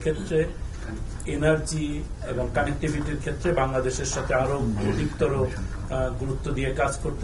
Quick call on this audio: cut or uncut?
uncut